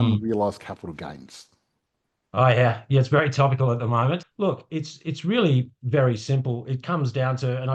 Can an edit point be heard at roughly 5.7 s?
no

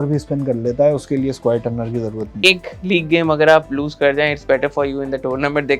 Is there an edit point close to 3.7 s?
no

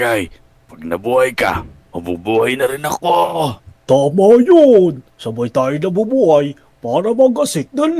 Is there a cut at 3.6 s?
no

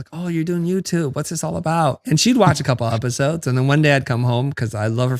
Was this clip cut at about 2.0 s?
yes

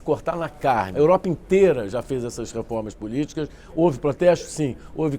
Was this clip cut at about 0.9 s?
yes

